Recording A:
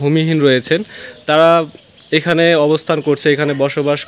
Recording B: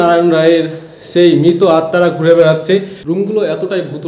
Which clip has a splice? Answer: B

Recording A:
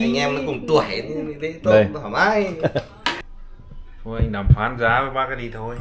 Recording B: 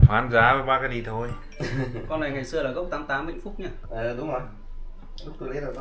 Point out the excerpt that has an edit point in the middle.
A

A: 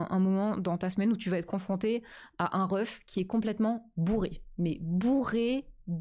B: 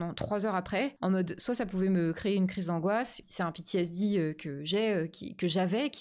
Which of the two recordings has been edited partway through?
B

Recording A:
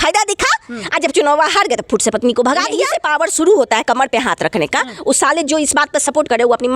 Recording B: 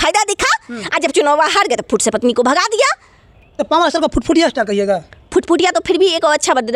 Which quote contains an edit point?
A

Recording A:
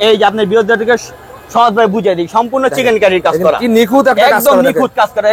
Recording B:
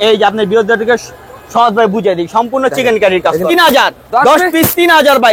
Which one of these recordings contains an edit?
B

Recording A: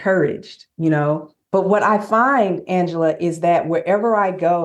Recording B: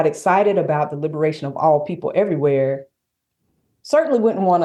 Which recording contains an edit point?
A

